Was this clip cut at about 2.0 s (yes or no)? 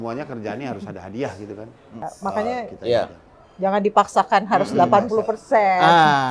yes